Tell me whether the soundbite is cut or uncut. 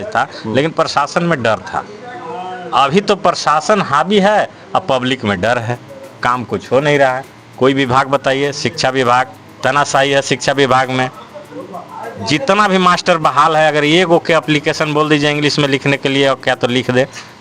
uncut